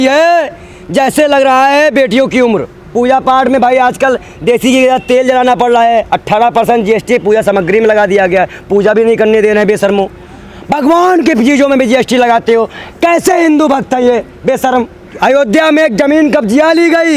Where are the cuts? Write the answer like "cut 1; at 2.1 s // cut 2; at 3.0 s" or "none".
cut 1; at 2.8 s // cut 2; at 15.0 s